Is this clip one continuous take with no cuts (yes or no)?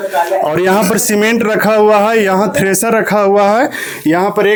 yes